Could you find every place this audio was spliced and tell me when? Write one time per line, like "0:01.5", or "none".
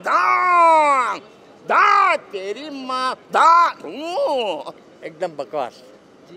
0:04.8